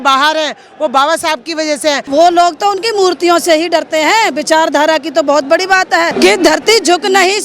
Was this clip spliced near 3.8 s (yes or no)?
no